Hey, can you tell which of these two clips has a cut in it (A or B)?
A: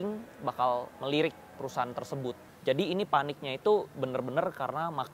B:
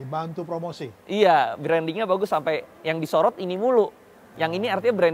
A